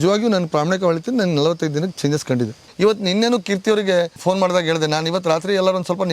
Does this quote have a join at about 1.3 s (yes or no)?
no